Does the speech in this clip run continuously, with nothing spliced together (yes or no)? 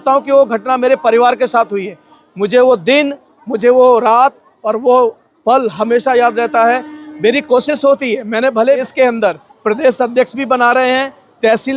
no